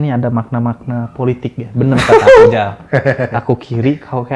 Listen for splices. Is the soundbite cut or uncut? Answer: uncut